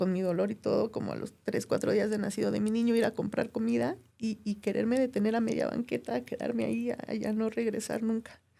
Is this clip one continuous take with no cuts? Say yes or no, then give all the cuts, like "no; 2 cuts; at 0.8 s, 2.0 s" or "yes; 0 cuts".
yes; 0 cuts